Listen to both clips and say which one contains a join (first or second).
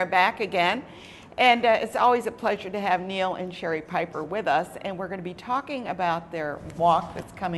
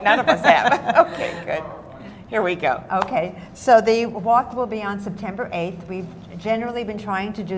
second